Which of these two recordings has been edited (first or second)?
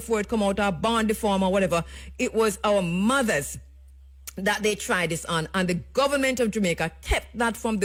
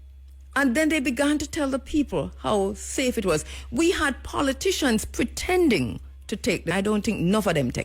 second